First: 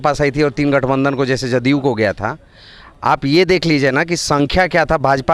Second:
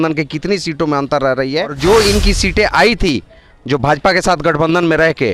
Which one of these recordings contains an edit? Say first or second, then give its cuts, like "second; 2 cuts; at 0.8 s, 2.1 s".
second; 1 cut; at 1.7 s